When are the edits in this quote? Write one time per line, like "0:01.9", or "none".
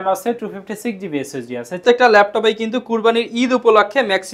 0:01.8